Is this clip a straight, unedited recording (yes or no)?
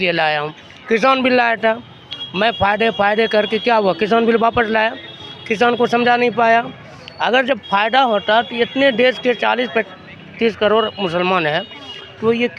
yes